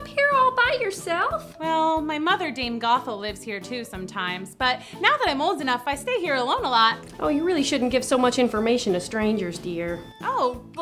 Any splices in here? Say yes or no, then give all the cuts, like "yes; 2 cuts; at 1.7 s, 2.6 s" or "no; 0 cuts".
no; 0 cuts